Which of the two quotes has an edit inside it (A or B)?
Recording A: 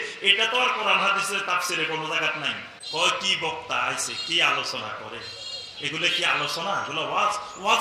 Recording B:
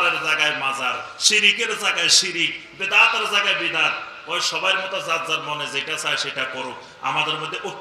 A